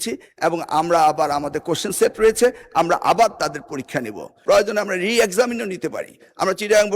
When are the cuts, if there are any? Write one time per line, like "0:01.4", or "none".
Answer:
0:04.3

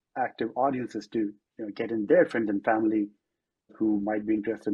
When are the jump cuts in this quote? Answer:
0:03.7

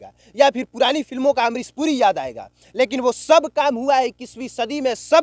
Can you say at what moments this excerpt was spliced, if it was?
none

